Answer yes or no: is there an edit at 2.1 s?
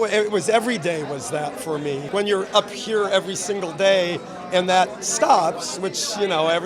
yes